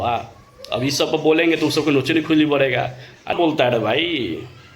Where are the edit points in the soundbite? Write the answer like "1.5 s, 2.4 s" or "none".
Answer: 3.3 s